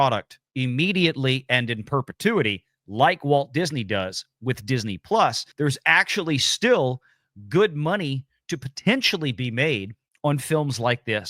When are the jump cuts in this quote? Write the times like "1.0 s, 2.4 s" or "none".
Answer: 5.4 s